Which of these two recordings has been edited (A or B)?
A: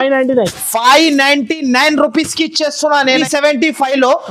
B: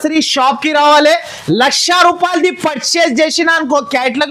A